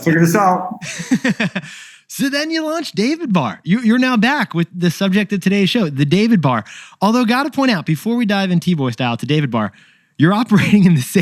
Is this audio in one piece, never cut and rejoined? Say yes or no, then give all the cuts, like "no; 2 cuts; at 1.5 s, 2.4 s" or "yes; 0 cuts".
yes; 0 cuts